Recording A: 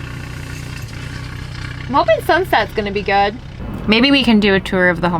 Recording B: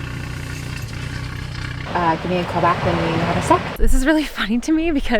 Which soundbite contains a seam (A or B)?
B